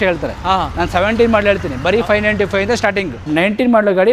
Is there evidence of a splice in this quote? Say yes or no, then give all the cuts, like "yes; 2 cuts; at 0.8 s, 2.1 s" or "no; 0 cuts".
yes; 1 cut; at 3.2 s